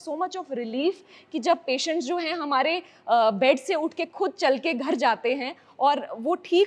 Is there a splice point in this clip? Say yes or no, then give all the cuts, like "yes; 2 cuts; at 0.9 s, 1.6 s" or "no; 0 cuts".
no; 0 cuts